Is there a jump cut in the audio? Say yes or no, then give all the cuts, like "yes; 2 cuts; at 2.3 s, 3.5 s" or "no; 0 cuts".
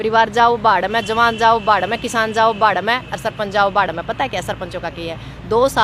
no; 0 cuts